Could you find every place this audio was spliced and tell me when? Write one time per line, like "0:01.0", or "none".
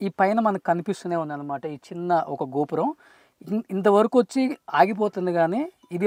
none